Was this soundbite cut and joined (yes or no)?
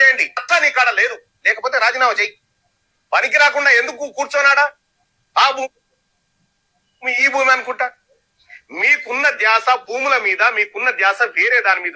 no